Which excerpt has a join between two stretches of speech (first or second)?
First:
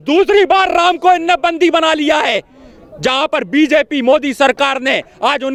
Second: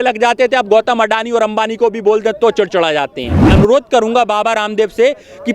second